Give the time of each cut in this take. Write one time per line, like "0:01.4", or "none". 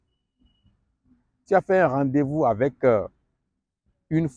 none